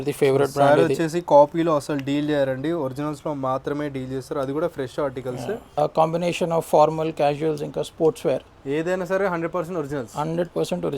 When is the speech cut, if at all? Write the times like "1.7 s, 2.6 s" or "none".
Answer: 5.8 s

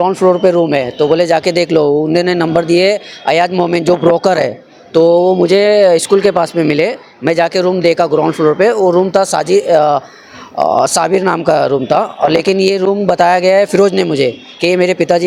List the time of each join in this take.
none

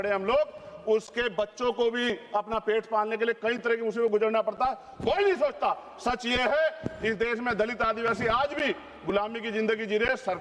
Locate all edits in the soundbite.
none

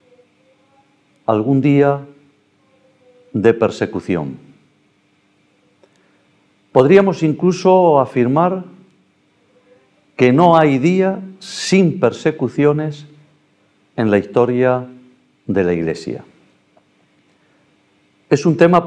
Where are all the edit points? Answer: 14.7 s

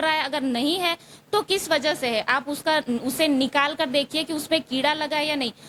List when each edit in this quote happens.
none

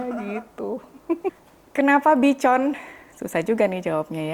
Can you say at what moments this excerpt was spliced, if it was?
1.3 s

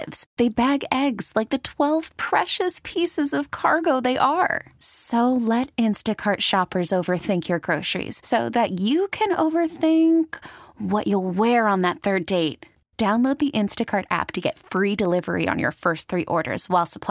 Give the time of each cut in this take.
none

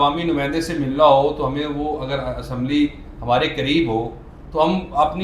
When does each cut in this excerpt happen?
none

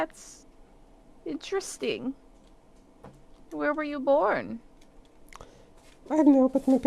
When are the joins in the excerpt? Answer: none

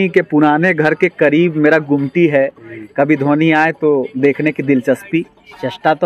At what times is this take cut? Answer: none

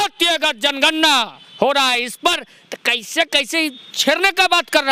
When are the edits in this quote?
none

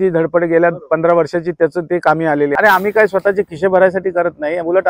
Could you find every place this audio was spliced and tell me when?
2.5 s

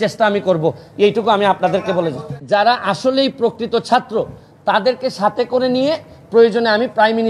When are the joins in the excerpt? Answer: 2.4 s

